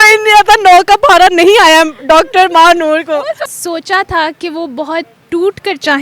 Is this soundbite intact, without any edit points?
no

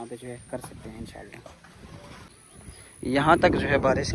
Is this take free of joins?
no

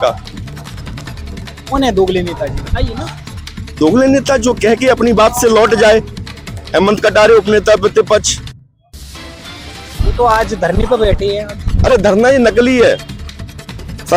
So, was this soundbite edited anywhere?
no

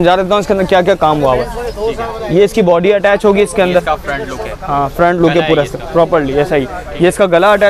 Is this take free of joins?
yes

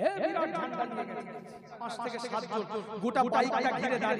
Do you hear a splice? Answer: yes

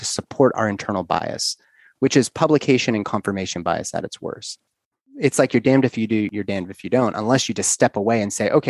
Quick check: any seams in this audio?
yes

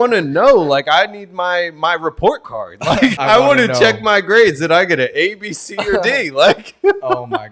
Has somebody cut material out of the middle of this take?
yes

